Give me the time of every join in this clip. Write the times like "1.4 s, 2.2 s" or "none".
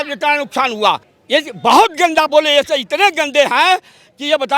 1.1 s

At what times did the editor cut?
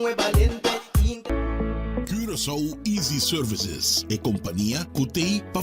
1.1 s

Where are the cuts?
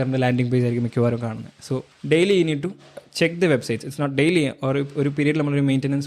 1.9 s

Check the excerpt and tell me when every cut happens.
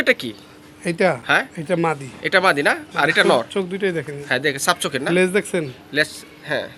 none

